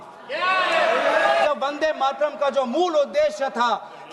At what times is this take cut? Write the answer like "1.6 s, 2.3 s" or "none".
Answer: 1.5 s